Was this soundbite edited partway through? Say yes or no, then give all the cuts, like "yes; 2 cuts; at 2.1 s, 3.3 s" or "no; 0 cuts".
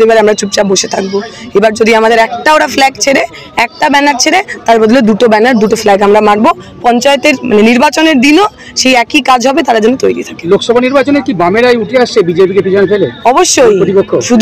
no; 0 cuts